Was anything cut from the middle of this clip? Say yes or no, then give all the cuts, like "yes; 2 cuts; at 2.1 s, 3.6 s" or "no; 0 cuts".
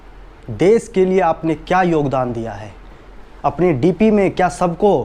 yes; 1 cut; at 3.0 s